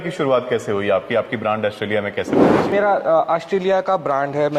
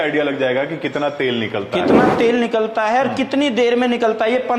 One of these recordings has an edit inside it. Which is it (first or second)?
first